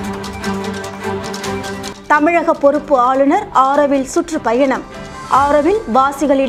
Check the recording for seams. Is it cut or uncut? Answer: uncut